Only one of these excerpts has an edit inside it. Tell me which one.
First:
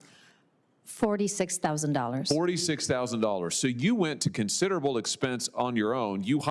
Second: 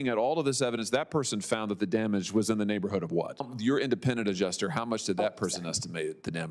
second; 1 cut; at 3.5 s

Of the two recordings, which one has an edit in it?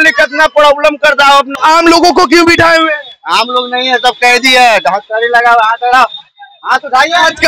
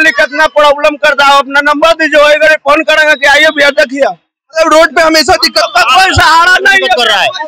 first; 1 cut; at 1.5 s

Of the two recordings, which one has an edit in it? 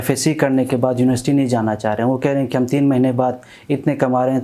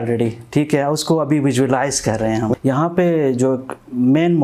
second; 1 cut; at 2.5 s

